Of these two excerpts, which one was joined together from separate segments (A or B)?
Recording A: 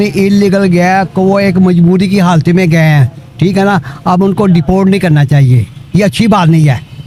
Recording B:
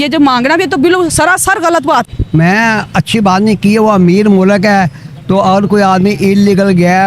B